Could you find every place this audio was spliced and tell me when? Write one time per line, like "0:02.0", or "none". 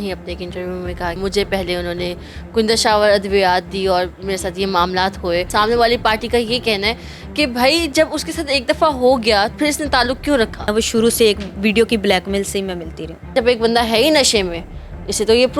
0:05.5
0:09.5
0:10.7
0:13.3